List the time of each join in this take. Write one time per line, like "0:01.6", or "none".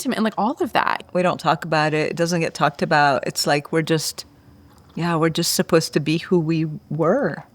0:01.0

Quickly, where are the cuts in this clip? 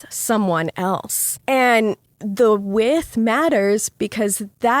0:01.2

